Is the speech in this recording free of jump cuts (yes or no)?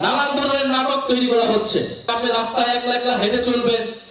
no